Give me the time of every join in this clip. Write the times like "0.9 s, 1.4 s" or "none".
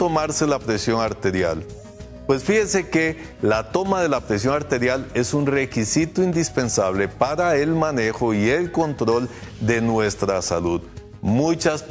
5.7 s